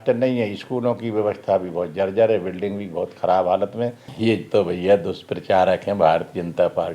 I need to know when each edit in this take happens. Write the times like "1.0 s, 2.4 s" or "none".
4.0 s